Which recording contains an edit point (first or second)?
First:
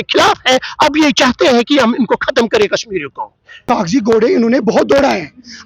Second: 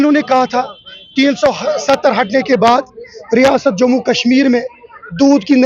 first